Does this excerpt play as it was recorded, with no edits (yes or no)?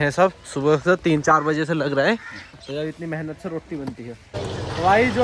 no